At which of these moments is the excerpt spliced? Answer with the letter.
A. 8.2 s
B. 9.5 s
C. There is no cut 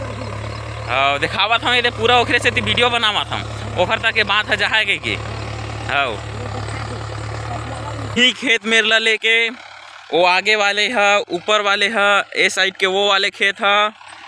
A